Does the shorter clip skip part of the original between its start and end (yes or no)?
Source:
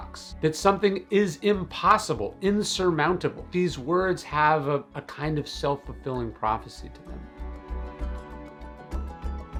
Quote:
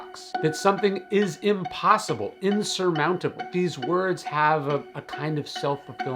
no